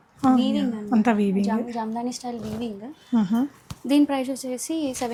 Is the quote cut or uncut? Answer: uncut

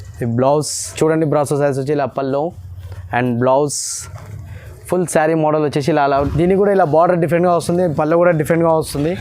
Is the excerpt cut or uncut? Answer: cut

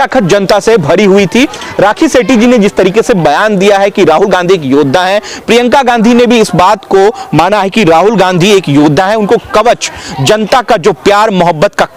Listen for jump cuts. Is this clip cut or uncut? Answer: uncut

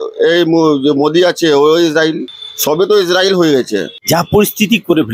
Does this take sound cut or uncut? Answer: uncut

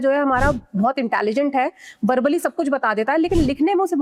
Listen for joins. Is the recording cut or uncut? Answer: uncut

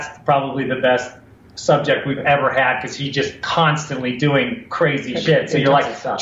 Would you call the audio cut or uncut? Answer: uncut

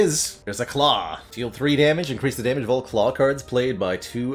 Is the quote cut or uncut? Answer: uncut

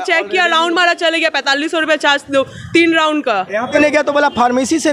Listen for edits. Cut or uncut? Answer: cut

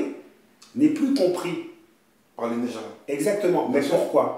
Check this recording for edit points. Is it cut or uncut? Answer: uncut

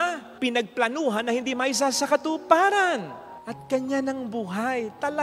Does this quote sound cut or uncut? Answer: uncut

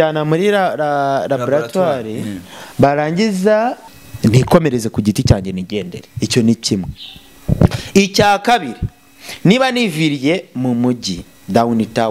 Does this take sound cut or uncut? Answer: cut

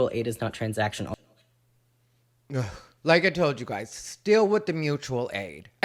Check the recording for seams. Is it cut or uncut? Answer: uncut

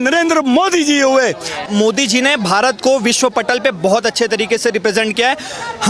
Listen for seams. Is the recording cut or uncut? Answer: cut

